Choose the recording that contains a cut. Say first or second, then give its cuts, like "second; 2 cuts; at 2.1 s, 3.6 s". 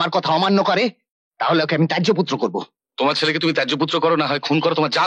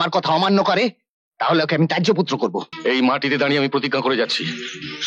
second; 1 cut; at 2.7 s